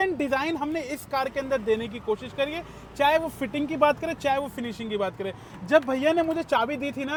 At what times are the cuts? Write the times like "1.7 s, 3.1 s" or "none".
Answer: none